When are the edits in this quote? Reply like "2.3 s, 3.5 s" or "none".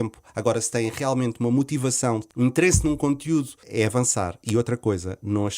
2.2 s, 3.6 s